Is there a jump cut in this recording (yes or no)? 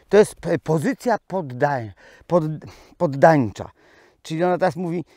no